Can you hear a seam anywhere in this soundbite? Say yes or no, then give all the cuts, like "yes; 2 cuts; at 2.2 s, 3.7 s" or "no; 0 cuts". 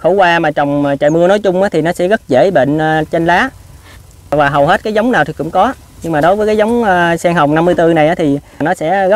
no; 0 cuts